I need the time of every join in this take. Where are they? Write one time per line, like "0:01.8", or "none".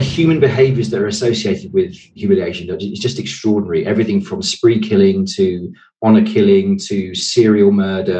0:02.1